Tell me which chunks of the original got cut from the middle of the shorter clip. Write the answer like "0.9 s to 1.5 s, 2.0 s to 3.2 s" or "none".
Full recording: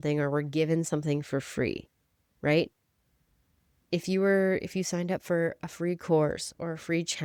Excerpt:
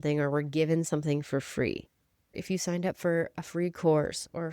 2.4 s to 4.6 s